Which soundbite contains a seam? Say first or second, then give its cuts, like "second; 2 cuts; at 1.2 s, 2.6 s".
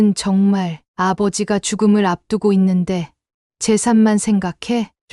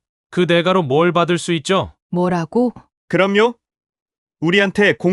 second; 2 cuts; at 2.0 s, 2.9 s